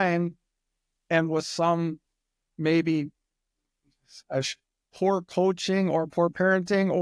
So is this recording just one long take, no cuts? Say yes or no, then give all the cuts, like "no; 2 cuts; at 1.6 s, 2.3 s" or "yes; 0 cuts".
yes; 0 cuts